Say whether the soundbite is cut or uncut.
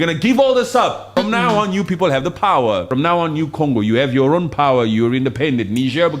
cut